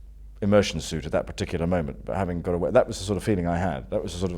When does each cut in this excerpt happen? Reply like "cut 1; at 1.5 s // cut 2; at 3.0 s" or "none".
none